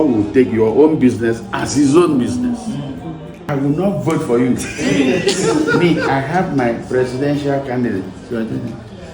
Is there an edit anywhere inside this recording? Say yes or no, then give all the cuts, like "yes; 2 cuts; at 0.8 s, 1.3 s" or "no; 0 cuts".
yes; 1 cut; at 3.4 s